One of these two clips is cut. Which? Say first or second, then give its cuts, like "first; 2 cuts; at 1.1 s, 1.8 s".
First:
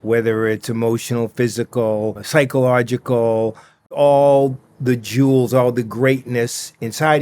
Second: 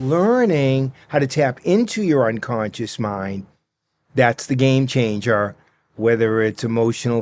first; 2 cuts; at 2.2 s, 4.0 s